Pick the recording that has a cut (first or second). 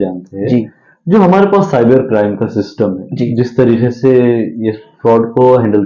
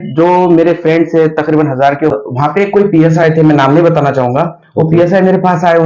second